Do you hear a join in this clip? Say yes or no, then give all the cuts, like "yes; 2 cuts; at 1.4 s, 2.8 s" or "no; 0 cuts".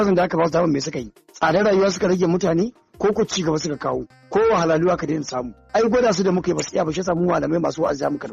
no; 0 cuts